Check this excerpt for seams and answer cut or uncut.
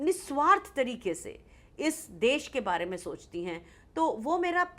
uncut